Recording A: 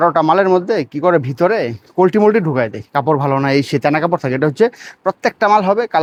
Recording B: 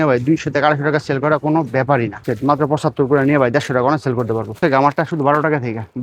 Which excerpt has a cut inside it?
B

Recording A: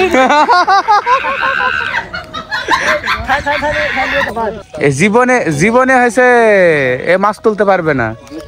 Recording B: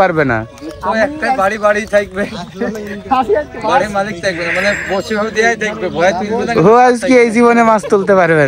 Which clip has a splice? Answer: A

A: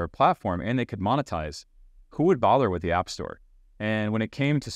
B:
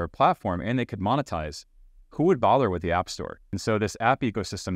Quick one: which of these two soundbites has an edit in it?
B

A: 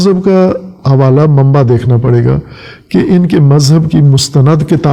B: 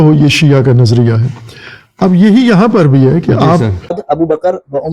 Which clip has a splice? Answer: B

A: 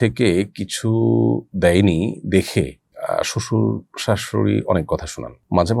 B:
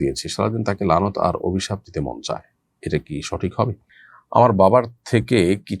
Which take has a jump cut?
B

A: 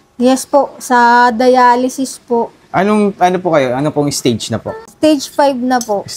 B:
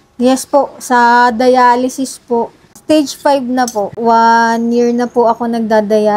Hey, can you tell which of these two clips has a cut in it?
B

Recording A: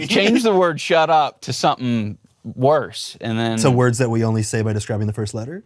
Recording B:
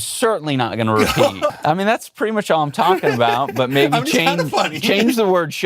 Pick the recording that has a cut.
B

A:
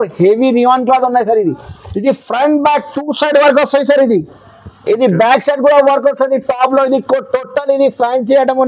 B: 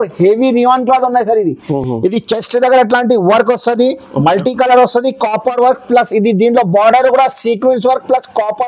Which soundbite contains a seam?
A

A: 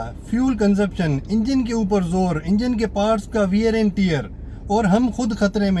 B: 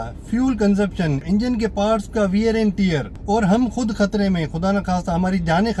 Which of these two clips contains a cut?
B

